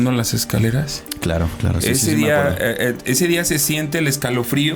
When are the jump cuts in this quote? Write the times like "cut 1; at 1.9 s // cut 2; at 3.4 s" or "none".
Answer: none